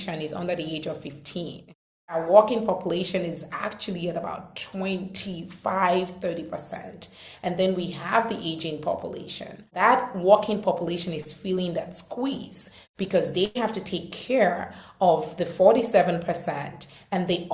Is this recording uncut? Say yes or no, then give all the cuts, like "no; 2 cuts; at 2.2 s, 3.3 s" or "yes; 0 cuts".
no; 2 cuts; at 2.2 s, 9.7 s